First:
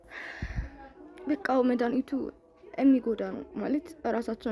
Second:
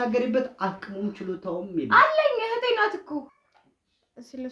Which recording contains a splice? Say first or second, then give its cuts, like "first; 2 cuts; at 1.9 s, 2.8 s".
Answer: second; 1 cut; at 3.3 s